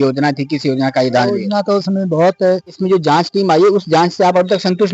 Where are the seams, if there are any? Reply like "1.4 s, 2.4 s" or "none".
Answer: 2.8 s